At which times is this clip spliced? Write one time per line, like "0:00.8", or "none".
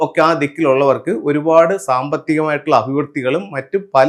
none

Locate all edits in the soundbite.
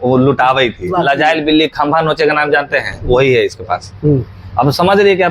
0:00.9

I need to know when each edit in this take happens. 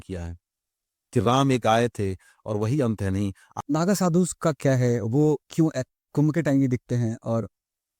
0:03.5

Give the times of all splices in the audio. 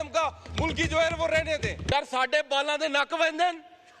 0:01.9

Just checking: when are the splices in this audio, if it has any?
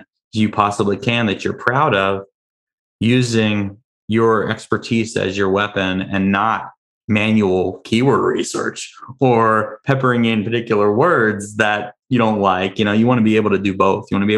none

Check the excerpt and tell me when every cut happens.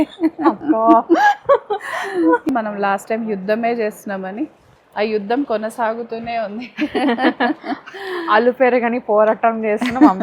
0:02.5

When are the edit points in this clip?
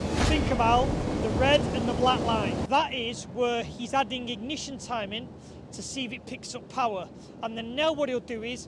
0:02.6

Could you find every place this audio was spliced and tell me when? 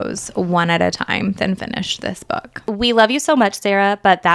0:02.6

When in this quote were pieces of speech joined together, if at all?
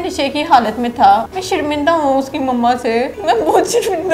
0:01.3
0:03.1

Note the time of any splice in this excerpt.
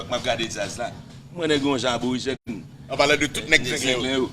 none

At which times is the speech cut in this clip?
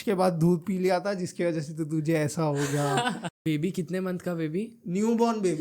0:03.3

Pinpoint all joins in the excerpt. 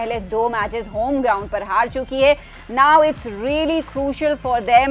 none

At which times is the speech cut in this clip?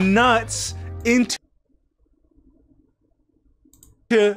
none

